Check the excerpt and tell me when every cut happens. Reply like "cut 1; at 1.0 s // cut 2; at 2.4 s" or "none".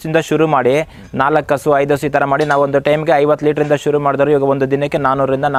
none